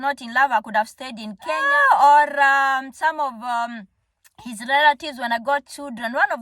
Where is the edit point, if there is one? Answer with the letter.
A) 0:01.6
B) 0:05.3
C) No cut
A